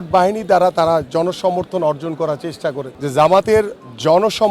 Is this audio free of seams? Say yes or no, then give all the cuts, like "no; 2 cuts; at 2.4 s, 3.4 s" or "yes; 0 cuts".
no; 1 cut; at 2.9 s